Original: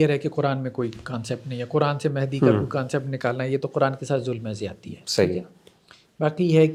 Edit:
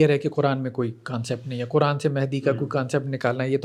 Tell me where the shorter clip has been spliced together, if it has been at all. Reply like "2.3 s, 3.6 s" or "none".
none